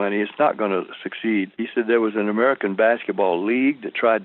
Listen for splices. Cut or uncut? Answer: cut